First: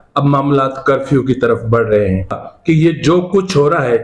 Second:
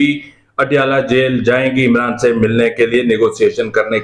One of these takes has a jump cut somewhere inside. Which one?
first; 1 cut; at 2.4 s

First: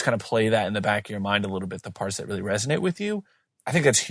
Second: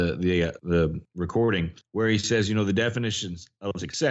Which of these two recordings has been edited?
second; 2 cuts; at 0.8 s, 1.8 s

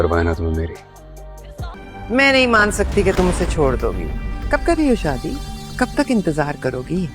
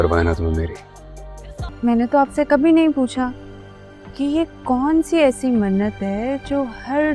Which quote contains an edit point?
first; 1 cut; at 1.6 s

